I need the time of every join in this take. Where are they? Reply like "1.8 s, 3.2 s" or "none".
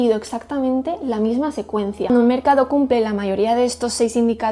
2.1 s